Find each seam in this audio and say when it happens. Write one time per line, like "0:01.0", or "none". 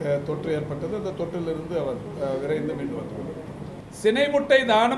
0:03.7